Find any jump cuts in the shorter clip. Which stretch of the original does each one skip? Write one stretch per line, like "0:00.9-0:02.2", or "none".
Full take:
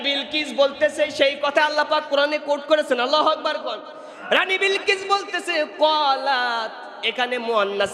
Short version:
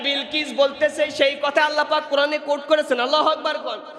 none